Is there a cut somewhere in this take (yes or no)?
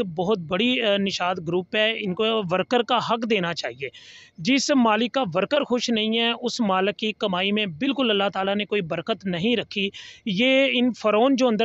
no